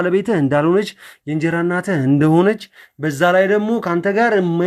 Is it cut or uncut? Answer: uncut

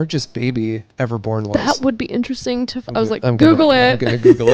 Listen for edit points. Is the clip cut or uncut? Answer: uncut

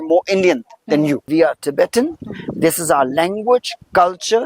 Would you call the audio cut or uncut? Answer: cut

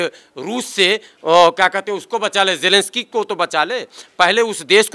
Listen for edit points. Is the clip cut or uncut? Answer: uncut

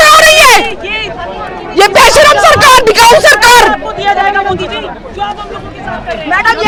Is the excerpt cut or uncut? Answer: uncut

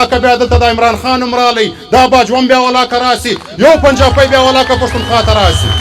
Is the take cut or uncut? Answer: uncut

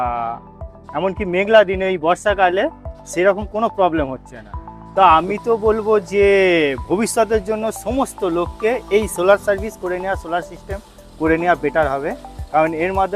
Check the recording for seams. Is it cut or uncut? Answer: cut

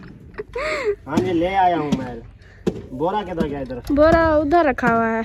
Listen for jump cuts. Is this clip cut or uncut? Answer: uncut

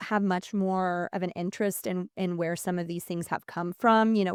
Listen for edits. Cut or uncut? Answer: uncut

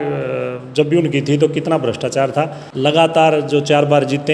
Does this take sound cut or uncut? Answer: cut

